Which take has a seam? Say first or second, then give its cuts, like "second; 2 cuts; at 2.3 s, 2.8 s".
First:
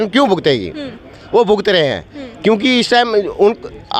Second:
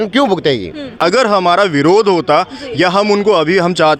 second; 1 cut; at 0.9 s